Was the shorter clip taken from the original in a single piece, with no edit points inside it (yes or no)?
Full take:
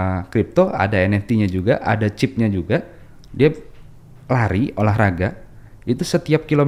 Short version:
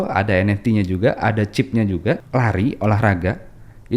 no